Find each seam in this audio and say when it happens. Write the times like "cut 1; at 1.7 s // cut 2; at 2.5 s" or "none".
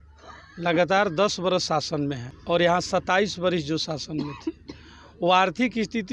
cut 1; at 2.3 s